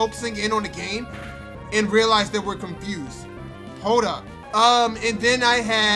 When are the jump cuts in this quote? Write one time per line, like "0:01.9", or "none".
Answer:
0:04.3